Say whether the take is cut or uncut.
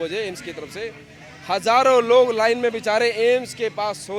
uncut